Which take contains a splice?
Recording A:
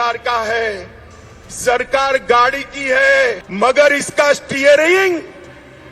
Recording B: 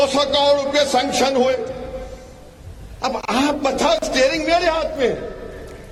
A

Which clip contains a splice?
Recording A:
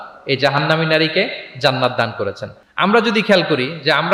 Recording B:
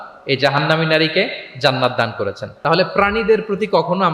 B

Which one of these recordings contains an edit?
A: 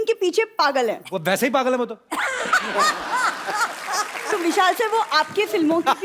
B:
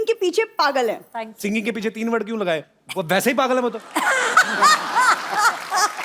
A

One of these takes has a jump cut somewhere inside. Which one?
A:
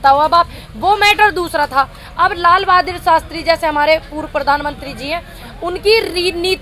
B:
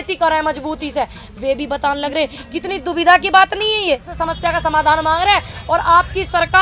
B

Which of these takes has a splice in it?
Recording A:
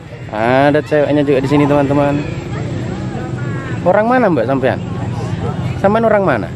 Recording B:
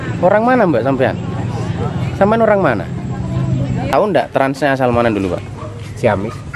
B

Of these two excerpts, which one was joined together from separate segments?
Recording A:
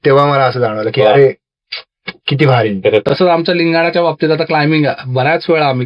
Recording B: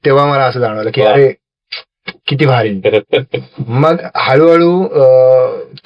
A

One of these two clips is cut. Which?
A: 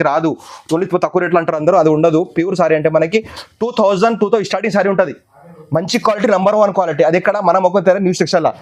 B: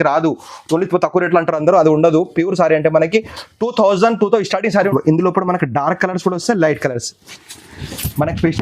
B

